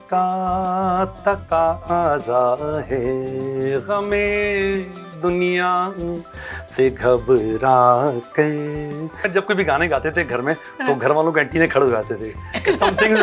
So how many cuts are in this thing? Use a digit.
1